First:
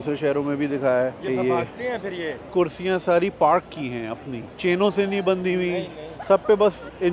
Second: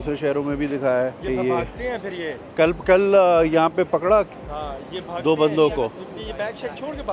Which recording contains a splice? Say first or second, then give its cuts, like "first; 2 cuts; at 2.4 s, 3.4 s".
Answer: first; 1 cut; at 2.5 s